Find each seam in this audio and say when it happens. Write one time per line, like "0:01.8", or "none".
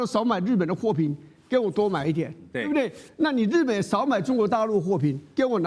none